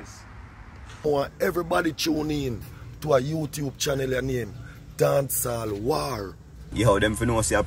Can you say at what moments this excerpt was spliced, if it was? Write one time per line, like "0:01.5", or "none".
0:01.0
0:06.7

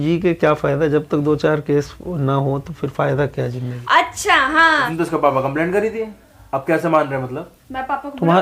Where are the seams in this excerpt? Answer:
0:04.7

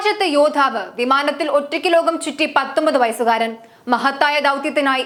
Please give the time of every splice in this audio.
none

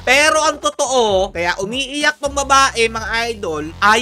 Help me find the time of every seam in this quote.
none

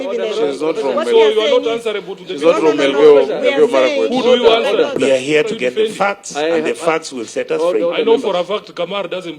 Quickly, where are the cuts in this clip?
0:05.0

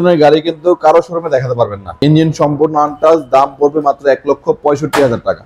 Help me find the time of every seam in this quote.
0:01.8

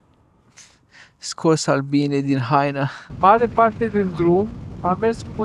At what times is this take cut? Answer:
0:03.0

